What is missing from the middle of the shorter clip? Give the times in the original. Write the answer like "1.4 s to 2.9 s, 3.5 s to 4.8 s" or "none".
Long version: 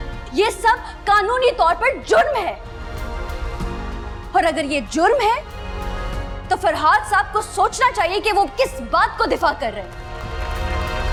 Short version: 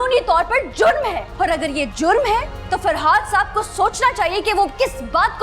2.6 s to 4.2 s, 5.5 s to 6.3 s

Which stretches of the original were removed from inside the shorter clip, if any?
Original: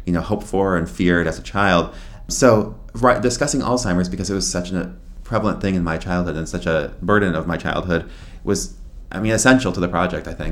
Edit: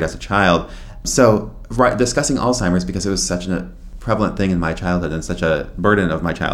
none

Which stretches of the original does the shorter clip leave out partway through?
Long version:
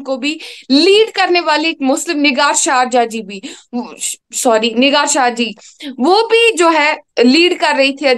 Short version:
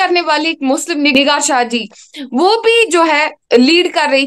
2.3 s to 4.8 s

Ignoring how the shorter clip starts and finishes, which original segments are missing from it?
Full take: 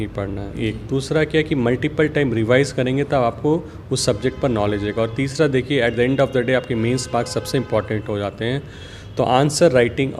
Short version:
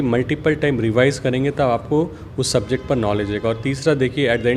none

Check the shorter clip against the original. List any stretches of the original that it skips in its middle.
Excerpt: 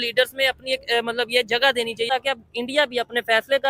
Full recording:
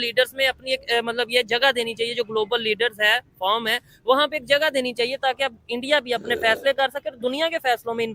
2.1 s to 5.2 s

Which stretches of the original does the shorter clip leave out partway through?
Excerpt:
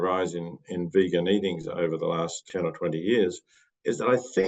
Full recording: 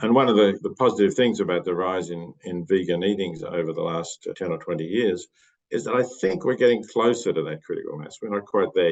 4.2 s to 4.3 s

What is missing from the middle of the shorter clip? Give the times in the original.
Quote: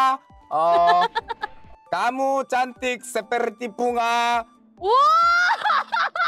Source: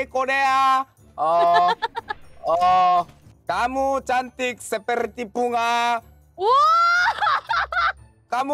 2.3 s to 3.2 s

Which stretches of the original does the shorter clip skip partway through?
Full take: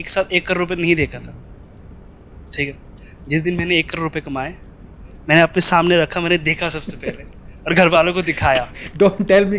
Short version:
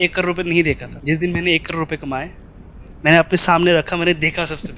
1.2 s to 3.1 s

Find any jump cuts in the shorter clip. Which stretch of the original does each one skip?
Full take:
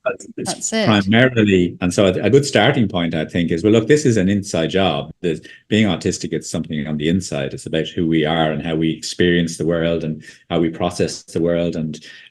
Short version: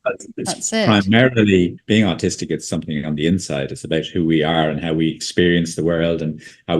1.8 s to 5.6 s

